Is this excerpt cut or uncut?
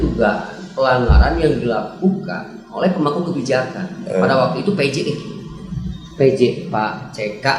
uncut